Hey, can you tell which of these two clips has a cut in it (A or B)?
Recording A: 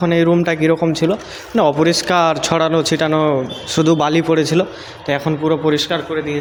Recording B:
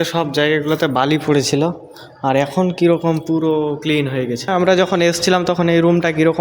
B